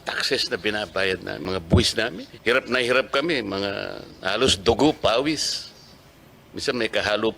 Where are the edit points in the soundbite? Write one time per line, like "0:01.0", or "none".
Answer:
0:01.4
0:02.3